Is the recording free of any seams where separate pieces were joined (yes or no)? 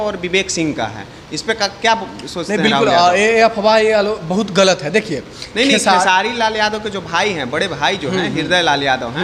yes